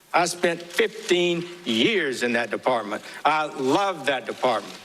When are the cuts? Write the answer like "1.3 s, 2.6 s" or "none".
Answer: none